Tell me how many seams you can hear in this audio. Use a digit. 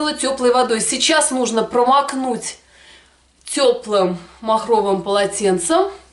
0